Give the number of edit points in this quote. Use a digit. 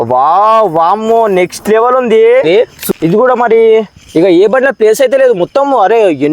1